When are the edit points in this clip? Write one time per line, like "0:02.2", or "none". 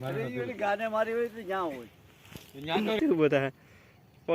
0:03.0